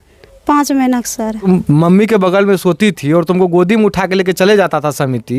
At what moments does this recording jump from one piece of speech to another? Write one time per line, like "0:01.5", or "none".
0:01.5